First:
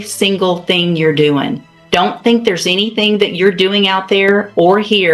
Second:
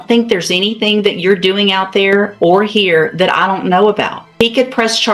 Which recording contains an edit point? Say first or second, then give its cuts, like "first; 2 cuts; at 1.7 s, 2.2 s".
second; 1 cut; at 4.2 s